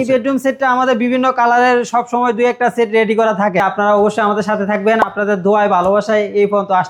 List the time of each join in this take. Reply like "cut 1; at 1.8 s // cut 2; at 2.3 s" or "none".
cut 1; at 3.6 s